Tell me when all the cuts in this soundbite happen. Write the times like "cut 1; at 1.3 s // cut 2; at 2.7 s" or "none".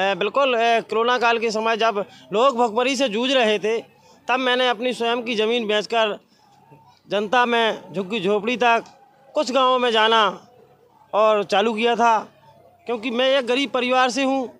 none